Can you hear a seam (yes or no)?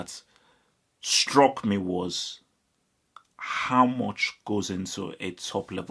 no